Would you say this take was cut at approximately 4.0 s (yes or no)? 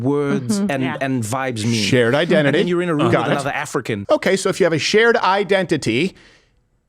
yes